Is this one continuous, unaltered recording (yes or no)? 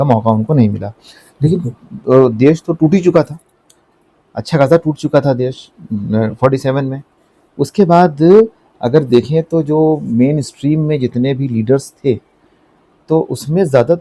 yes